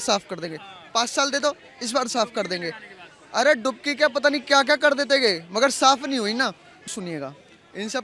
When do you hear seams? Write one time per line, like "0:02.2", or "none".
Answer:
0:06.9